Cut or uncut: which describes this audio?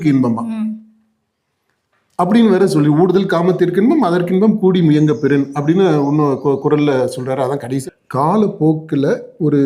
cut